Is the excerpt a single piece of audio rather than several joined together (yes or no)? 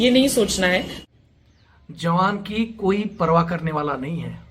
no